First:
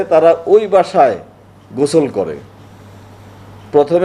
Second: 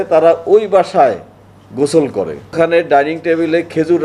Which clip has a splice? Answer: second; 1 cut; at 2.5 s

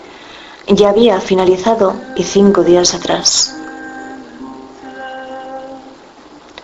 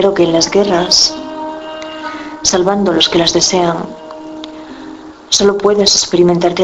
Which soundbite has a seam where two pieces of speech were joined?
second; 1 cut; at 5.0 s

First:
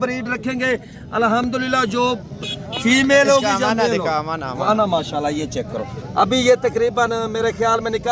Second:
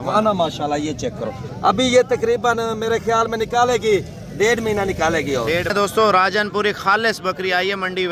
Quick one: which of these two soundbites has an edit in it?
second; 1 cut; at 5.7 s

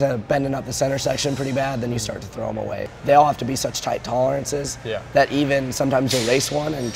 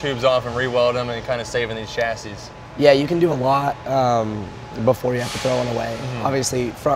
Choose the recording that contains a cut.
first; 1 cut; at 2.9 s

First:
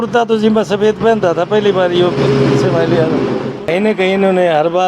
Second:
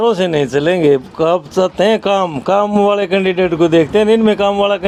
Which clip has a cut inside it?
first; 1 cut; at 3.5 s

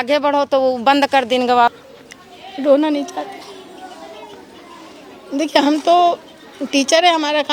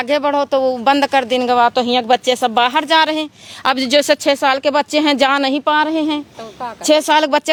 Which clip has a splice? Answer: first; 1 cut; at 1.7 s

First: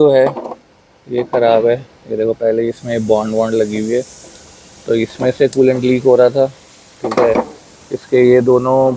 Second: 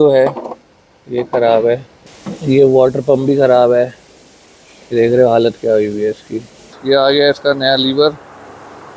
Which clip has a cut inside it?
second; 2 cuts; at 2.0 s, 6.7 s

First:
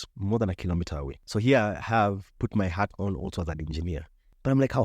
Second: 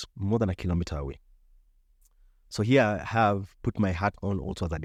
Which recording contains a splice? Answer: first; 1 cut; at 1.2 s

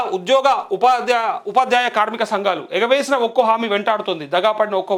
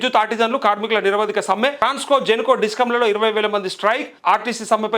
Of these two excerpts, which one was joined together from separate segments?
second; 2 cuts; at 1.8 s, 4.1 s

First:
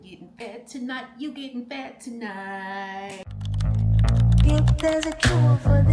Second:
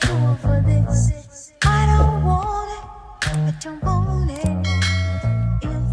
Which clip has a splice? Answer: first; 1 cut; at 3.5 s

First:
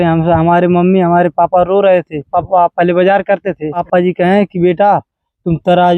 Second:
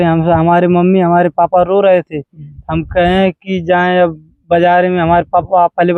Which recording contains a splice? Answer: first; 2 cuts; at 2.3 s, 3.8 s

